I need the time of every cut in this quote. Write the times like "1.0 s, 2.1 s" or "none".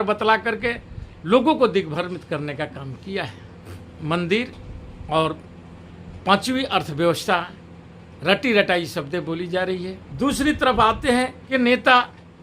3.8 s, 10.0 s, 11.4 s